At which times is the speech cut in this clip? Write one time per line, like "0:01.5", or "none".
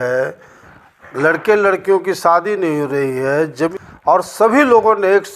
0:03.7